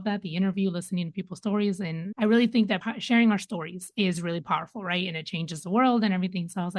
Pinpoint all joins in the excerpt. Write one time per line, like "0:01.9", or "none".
0:02.0
0:02.9